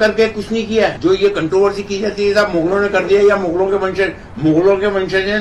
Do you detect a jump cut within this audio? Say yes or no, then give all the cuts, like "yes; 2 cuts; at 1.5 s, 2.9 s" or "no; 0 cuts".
yes; 1 cut; at 1.0 s